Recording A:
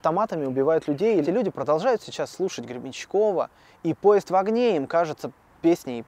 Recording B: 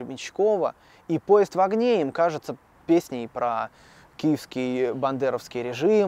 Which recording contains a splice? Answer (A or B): A